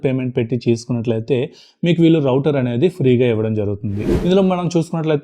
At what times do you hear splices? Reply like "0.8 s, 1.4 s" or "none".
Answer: 4.0 s